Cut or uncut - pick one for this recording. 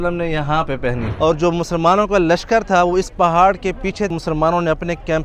cut